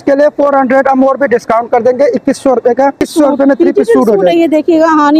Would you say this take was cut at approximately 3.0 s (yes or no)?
yes